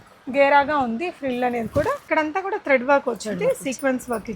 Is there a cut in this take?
yes; 1 cut; at 2.0 s

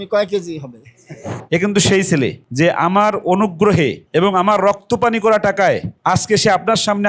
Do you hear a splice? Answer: yes; 1 cut; at 1.3 s

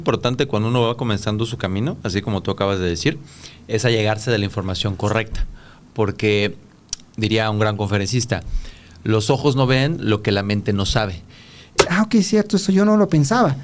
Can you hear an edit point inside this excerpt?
yes; 1 cut; at 11.6 s

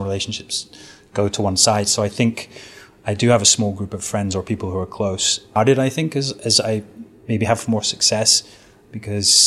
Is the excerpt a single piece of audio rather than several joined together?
no; 1 cut; at 5.6 s

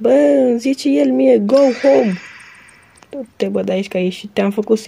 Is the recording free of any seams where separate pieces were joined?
yes; 0 cuts

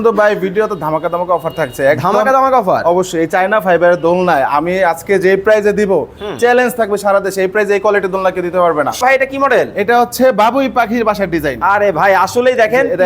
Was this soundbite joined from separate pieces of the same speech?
yes; 1 cut; at 9.0 s

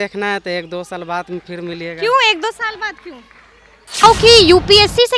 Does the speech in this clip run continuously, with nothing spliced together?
no; 1 cut; at 4.0 s

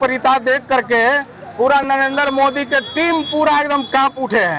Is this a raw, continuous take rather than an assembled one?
yes; 0 cuts

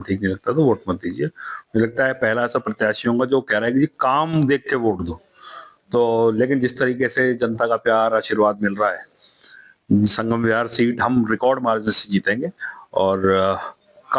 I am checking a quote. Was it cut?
no; 0 cuts

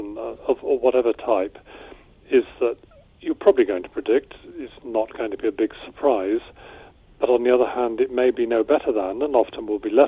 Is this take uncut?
yes; 0 cuts

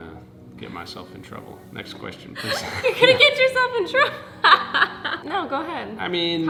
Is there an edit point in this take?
no; 0 cuts

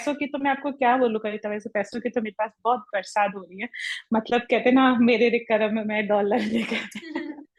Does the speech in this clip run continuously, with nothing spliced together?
yes; 0 cuts

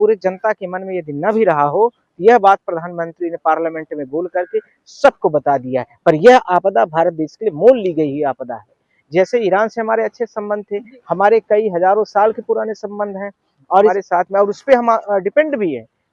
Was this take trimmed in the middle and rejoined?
yes; 1 cut; at 13.9 s

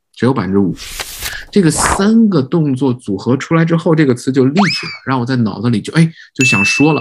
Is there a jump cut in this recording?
yes; 1 cut; at 1.2 s

